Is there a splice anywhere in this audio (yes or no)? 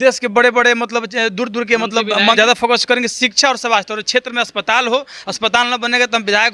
yes